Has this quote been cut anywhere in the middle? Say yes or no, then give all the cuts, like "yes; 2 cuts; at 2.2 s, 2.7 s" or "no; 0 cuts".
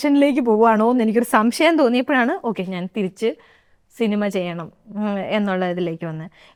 no; 0 cuts